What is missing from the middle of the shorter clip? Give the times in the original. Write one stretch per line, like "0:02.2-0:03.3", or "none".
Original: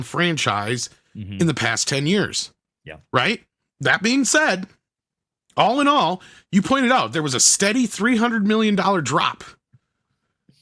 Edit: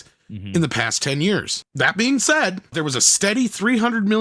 0:02.4-0:03.6
0:04.8-0:07.1